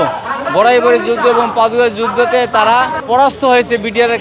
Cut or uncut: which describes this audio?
cut